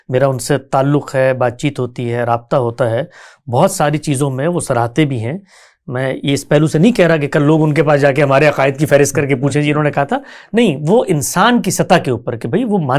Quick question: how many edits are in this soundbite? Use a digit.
0